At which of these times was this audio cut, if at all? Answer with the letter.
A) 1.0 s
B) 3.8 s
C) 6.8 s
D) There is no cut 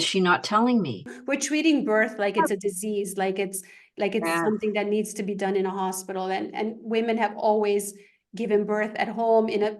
A